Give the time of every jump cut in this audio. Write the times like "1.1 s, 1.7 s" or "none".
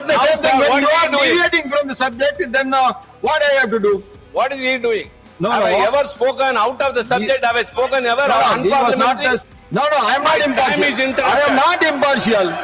9.5 s